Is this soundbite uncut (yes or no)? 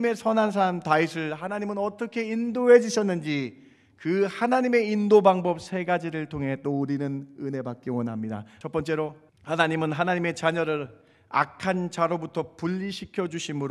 no